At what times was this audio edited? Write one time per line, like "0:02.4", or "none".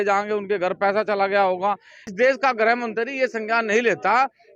0:02.1